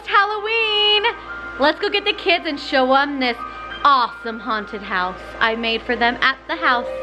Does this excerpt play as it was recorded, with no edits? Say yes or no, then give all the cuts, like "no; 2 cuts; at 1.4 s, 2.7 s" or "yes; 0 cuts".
yes; 0 cuts